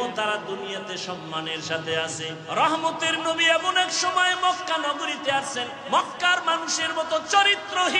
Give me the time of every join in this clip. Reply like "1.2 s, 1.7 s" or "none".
2.4 s